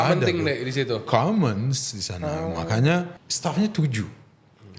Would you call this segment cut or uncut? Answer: cut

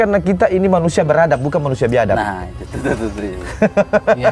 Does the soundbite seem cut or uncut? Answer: uncut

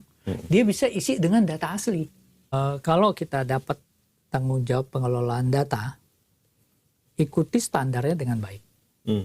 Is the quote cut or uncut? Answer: cut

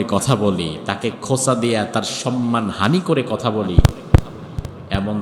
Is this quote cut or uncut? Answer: uncut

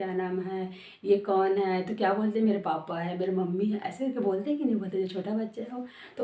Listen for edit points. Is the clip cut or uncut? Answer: uncut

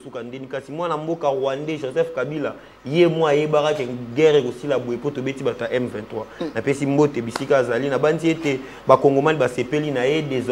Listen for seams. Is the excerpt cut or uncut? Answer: uncut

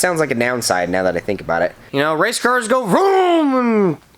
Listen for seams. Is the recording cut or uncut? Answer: cut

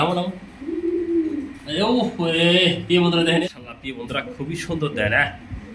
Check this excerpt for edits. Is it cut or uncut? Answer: cut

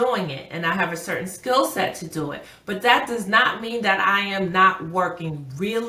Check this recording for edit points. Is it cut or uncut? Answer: uncut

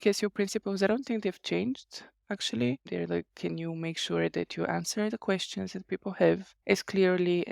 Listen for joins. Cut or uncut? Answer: cut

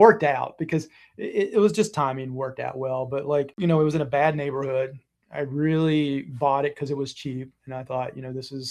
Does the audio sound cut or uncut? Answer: cut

